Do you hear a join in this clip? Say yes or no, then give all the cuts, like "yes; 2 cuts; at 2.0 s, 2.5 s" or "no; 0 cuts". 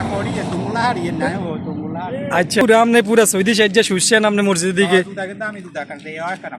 yes; 1 cut; at 2.6 s